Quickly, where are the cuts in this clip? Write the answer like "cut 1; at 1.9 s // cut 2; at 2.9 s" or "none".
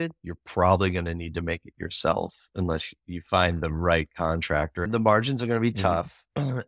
cut 1; at 4.8 s